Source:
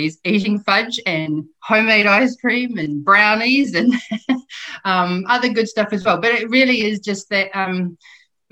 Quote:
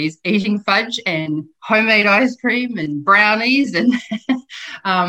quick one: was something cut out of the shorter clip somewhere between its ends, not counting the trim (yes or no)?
no